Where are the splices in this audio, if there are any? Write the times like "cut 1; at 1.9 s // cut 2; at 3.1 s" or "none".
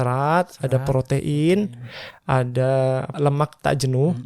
cut 1; at 3.1 s